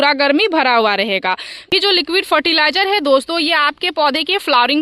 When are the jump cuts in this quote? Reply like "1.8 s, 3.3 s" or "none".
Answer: 1.7 s